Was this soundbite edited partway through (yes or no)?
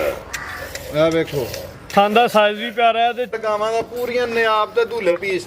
yes